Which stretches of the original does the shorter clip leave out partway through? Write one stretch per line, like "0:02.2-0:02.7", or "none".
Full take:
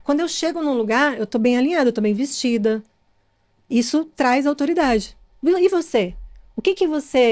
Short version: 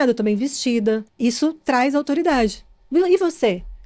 0:02.9-0:03.6